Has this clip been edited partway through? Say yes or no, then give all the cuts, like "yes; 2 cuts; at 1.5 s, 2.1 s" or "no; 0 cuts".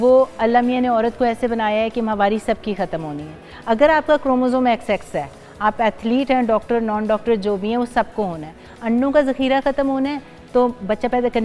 no; 0 cuts